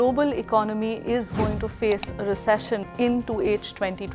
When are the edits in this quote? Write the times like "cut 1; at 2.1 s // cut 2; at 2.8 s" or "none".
cut 1; at 2.9 s